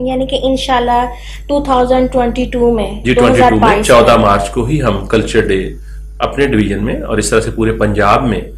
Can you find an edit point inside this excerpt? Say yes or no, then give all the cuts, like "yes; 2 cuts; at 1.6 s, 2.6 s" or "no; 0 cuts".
no; 0 cuts